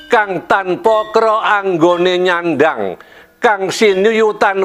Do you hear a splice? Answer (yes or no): no